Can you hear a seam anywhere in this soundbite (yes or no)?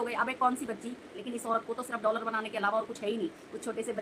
yes